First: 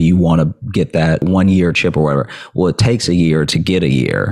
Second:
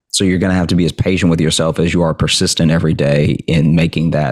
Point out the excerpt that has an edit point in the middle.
first; 1 cut; at 1.2 s

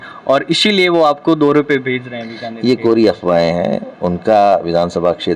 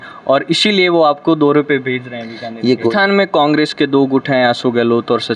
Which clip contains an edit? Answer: second; 1 cut; at 2.9 s

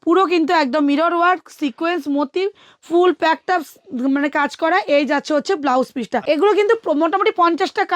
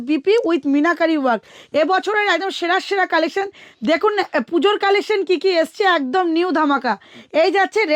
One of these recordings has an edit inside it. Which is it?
first; 1 cut; at 6.2 s

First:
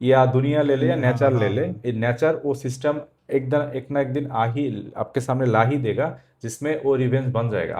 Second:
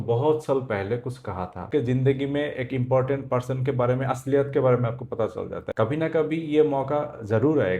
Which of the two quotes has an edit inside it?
second; 2 cuts; at 1.7 s, 5.6 s

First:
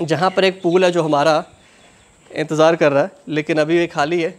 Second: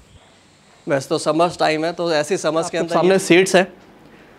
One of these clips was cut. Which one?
second; 1 cut; at 2.8 s

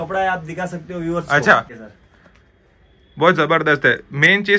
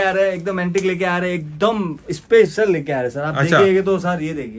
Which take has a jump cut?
first; 1 cut; at 1.8 s

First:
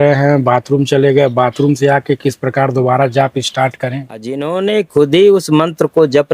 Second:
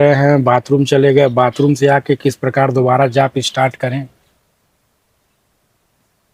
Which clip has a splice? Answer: first; 1 cut; at 4.4 s

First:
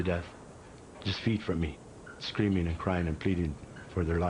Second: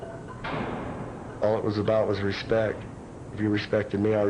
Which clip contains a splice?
first; 1 cut; at 1.6 s

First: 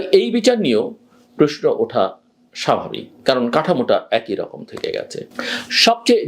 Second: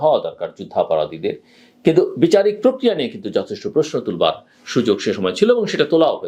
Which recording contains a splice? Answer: first; 1 cut; at 5.3 s

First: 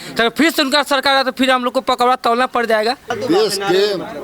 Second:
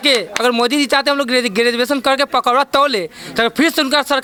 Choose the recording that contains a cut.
first; 1 cut; at 3.2 s

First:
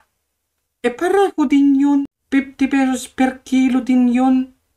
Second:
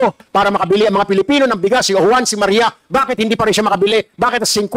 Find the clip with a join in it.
first; 1 cut; at 2.0 s

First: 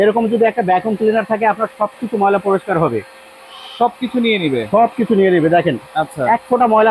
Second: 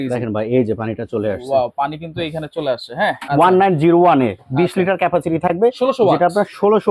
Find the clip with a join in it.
second; 1 cut; at 3.2 s

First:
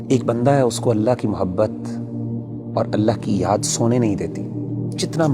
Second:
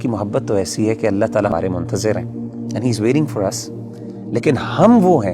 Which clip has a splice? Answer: second; 1 cut; at 1.5 s

